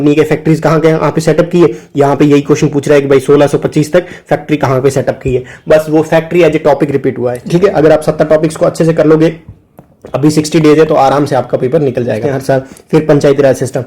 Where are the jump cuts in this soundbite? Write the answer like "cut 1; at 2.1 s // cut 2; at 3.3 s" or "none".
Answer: cut 1; at 7.3 s // cut 2; at 12.3 s